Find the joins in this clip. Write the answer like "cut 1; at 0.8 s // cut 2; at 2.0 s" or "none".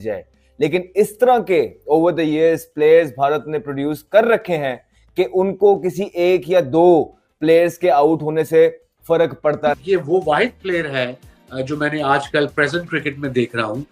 cut 1; at 9.8 s